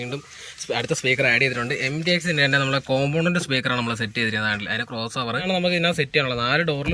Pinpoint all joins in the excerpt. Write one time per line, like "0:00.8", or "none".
0:05.4